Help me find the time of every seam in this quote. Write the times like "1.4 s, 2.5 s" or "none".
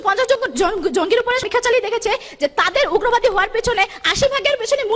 1.4 s